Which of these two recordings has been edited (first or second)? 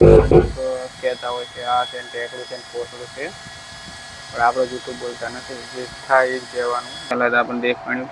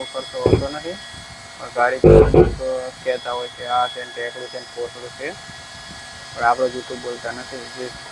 first